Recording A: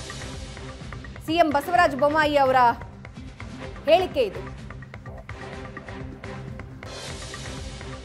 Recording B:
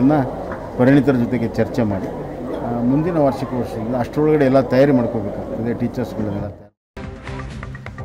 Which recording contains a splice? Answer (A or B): B